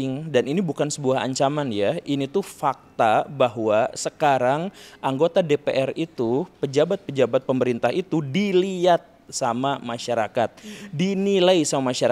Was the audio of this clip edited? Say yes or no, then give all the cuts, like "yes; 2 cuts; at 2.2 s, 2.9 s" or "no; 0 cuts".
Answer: no; 0 cuts